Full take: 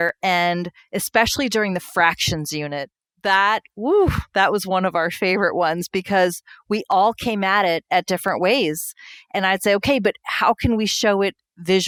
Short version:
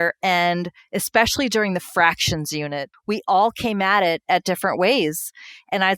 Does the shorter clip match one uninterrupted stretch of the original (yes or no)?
no